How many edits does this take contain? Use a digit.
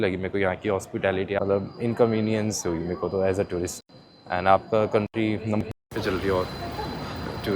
1